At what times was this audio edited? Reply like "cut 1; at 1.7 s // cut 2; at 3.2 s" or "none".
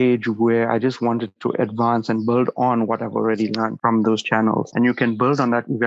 cut 1; at 4.7 s